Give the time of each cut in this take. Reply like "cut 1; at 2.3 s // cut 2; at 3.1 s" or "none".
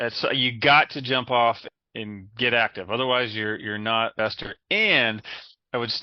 cut 1; at 1.6 s // cut 2; at 4.1 s